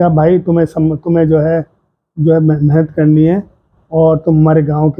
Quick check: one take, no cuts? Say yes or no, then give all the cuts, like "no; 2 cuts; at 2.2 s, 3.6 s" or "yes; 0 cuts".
yes; 0 cuts